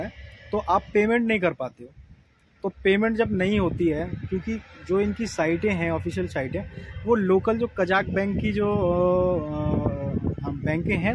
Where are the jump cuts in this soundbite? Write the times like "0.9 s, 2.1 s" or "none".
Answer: none